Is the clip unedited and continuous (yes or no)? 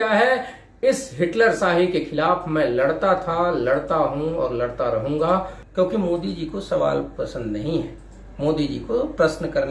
no